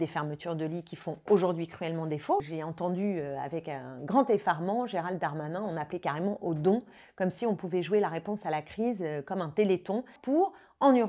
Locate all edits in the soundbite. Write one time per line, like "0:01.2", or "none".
0:02.4
0:10.2